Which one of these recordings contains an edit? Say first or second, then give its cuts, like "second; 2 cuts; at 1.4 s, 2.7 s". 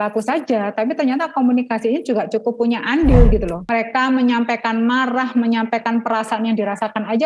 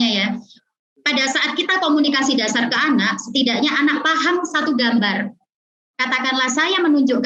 first; 1 cut; at 3.6 s